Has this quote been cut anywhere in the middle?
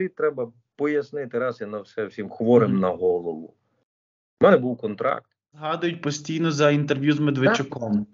yes; 1 cut; at 5.7 s

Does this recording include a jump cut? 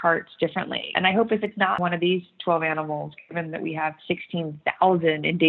yes; 2 cuts; at 0.8 s, 1.8 s

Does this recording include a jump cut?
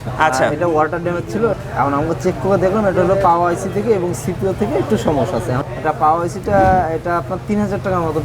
yes; 2 cuts; at 1.6 s, 5.6 s

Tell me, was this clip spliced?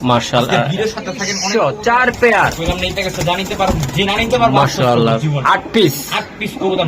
yes; 1 cut; at 1.3 s

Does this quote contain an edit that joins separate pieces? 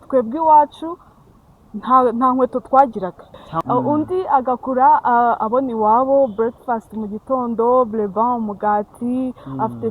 yes; 1 cut; at 3.4 s

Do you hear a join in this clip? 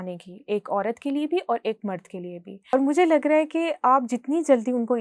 yes; 1 cut; at 2.7 s

